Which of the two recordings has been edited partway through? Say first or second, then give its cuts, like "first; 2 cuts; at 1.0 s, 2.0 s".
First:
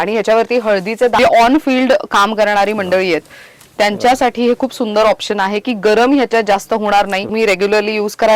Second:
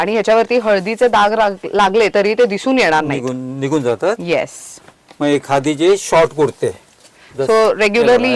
first; 2 cuts; at 1.2 s, 7.3 s